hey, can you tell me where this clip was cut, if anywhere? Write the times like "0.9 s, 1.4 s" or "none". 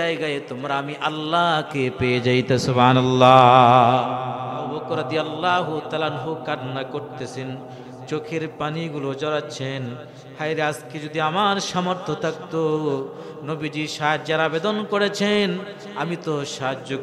4.7 s